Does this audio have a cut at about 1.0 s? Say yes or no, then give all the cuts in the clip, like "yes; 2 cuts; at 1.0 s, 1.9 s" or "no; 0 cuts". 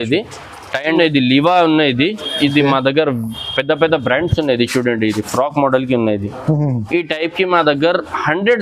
yes; 1 cut; at 1.0 s